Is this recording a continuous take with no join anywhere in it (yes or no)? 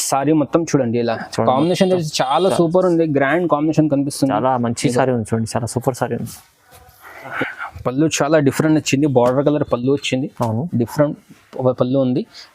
no